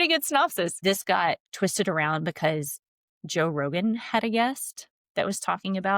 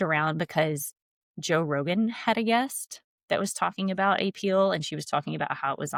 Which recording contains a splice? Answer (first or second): first